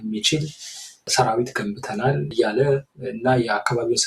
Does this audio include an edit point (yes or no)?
yes